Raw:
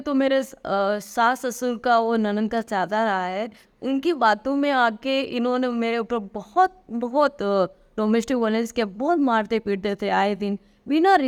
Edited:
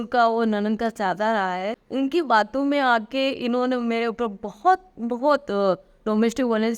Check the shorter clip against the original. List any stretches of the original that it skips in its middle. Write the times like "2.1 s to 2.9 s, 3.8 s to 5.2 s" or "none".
3.5 s to 3.7 s

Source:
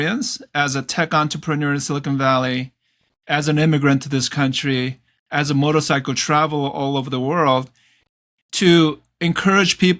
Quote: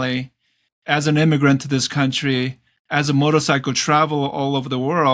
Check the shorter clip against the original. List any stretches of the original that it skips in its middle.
none

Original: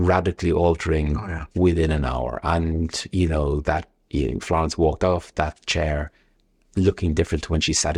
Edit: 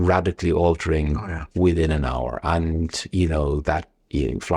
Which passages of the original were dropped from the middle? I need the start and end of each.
none

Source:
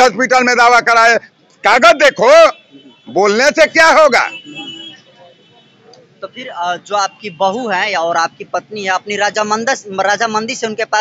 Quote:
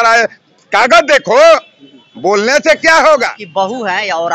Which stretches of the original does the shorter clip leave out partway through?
4.3 s to 7.2 s

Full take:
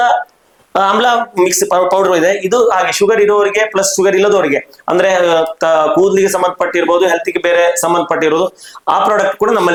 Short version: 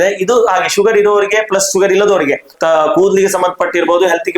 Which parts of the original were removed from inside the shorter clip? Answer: 4.8 s to 5.5 s

